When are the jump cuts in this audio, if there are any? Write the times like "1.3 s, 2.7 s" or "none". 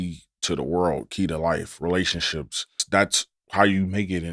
2.8 s